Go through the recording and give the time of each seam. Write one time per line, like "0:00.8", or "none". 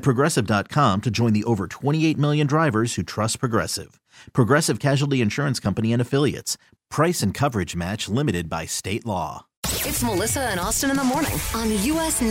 0:09.5